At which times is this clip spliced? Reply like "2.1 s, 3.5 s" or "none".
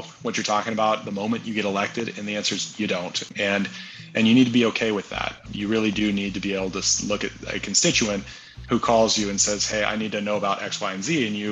5.4 s

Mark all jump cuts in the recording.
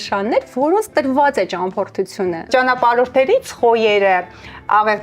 2.5 s

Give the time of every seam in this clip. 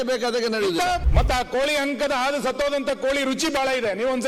1.0 s

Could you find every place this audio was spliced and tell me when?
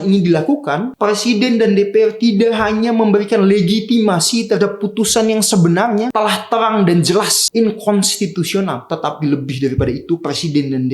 0.9 s, 6.1 s, 7.4 s, 8.8 s

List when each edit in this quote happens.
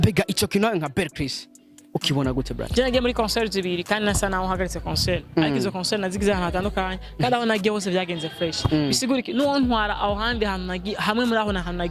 2.7 s

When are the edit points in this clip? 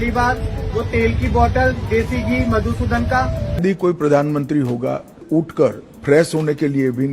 3.6 s, 5.2 s

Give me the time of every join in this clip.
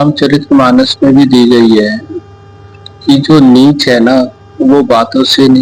none

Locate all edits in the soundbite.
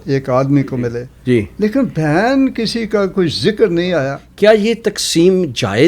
1.1 s, 4.2 s

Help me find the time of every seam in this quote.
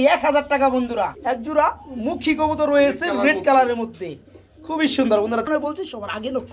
1.2 s, 5.5 s

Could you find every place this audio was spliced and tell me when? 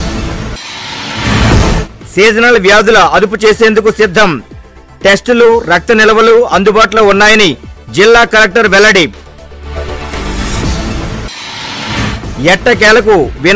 none

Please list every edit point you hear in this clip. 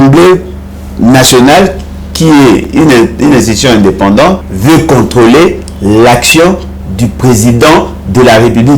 4.5 s

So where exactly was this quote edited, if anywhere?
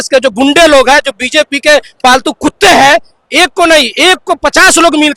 none

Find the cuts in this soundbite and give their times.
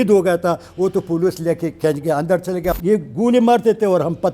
2.7 s

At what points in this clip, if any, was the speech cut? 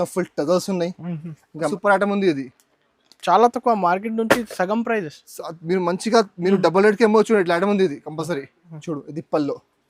1.7 s, 8.7 s

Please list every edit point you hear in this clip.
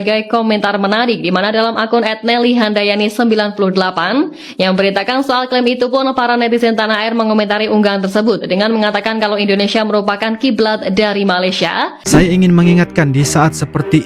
12.0 s

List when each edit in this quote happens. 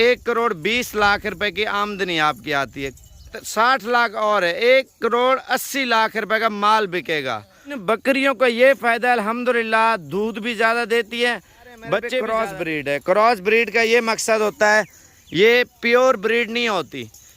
3.4 s, 7.8 s, 12.2 s

